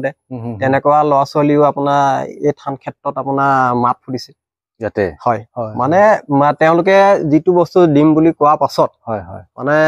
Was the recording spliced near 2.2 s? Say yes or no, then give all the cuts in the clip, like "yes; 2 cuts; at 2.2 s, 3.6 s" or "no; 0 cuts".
no; 0 cuts